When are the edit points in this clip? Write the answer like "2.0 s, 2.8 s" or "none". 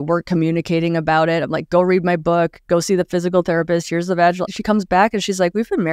none